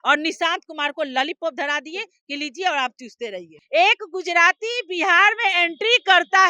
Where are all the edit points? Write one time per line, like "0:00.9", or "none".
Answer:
0:03.5